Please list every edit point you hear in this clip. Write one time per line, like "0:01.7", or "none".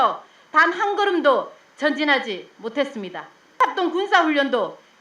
0:03.6